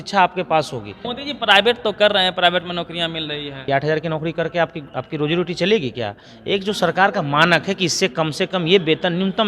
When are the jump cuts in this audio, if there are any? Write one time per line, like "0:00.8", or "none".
0:01.1
0:03.7